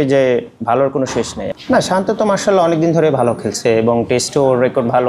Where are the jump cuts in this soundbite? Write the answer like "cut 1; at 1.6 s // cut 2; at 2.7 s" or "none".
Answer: cut 1; at 1.4 s

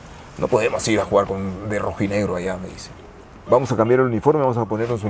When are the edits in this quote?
none

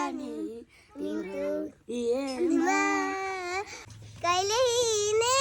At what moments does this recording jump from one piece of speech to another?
cut 1; at 3.8 s

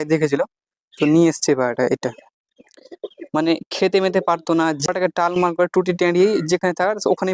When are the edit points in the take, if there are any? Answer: cut 1; at 4.9 s

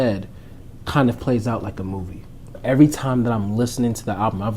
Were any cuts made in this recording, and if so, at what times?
cut 1; at 2.5 s

